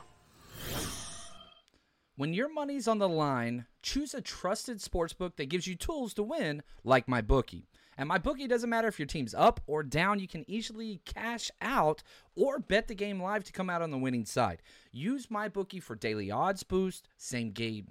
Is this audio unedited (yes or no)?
no